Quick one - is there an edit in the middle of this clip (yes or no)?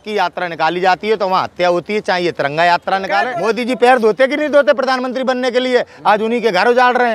yes